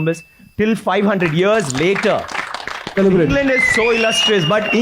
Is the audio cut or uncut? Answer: cut